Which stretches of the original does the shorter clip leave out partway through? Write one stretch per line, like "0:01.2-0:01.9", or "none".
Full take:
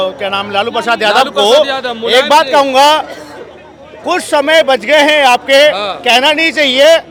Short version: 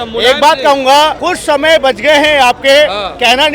0:03.1-0:04.0